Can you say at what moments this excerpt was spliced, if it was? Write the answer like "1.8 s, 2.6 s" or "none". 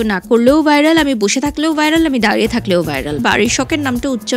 3.2 s